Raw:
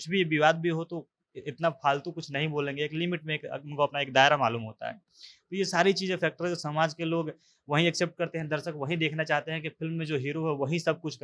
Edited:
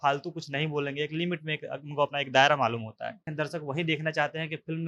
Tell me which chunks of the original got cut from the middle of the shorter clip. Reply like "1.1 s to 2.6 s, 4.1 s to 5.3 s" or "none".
5.1 s to 8.4 s